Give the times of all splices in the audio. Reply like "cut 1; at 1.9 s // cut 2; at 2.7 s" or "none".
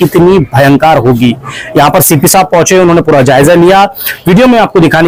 none